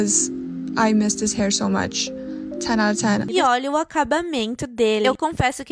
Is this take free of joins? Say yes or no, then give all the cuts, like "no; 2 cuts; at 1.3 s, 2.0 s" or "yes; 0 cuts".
no; 1 cut; at 3.3 s